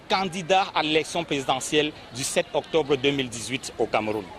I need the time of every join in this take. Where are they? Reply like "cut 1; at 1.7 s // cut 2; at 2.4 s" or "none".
none